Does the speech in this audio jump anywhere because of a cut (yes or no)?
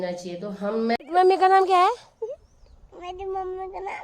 yes